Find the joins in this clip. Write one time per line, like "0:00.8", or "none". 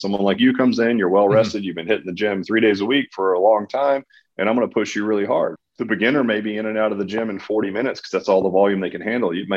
0:05.5